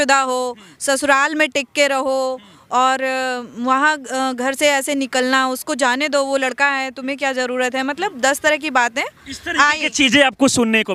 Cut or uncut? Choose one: uncut